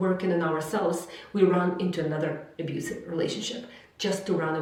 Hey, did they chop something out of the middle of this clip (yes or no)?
no